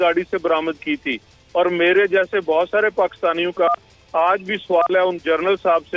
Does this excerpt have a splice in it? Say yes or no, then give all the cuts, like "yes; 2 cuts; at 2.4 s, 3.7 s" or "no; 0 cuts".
no; 0 cuts